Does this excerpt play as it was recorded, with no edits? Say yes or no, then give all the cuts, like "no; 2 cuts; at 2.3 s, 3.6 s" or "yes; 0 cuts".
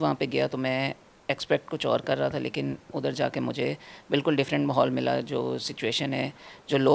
yes; 0 cuts